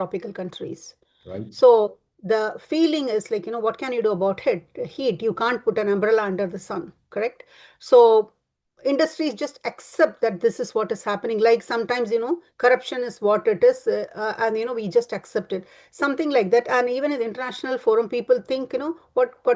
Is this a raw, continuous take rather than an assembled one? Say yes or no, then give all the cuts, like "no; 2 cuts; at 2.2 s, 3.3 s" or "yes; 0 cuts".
yes; 0 cuts